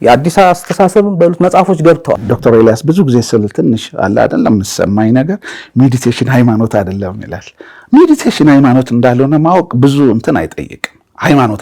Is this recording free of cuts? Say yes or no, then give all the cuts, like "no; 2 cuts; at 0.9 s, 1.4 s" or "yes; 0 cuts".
no; 1 cut; at 2.3 s